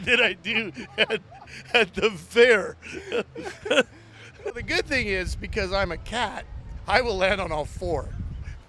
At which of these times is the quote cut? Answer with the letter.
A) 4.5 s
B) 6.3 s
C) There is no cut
A